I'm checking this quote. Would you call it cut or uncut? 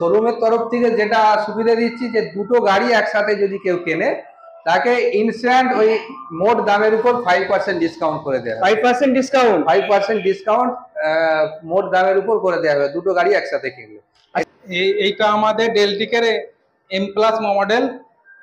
cut